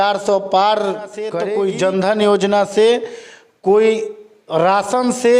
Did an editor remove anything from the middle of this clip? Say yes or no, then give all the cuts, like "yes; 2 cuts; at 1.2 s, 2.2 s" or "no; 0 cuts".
yes; 1 cut; at 1.4 s